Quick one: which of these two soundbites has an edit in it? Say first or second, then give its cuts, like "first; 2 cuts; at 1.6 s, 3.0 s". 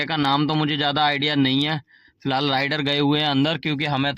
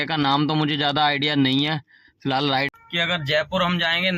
second; 1 cut; at 2.7 s